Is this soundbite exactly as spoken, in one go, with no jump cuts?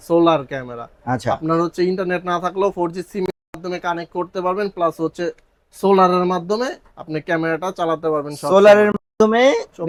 yes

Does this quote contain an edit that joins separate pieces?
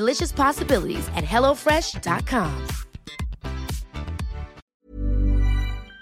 yes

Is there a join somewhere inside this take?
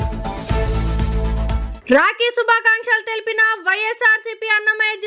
yes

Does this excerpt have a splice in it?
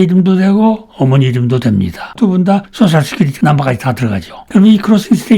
no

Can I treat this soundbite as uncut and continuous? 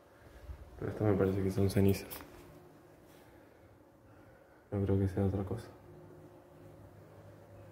yes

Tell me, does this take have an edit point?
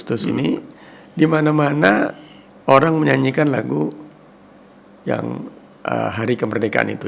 no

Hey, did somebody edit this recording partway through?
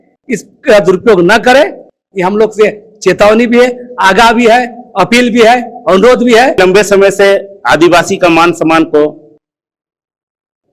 yes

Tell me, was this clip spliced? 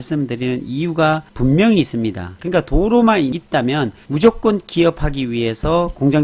yes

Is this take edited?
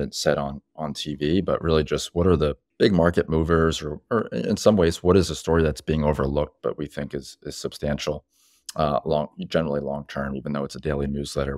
yes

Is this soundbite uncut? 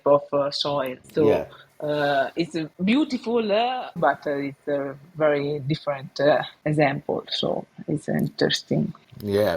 no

